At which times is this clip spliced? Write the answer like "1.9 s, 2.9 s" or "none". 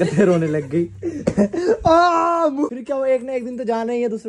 2.8 s

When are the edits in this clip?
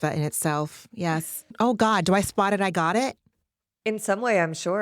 1.4 s

